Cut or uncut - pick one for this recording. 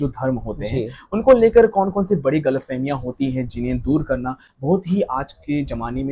uncut